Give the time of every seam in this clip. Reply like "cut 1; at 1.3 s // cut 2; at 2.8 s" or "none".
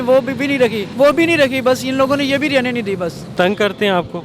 cut 1; at 0.8 s // cut 2; at 3.3 s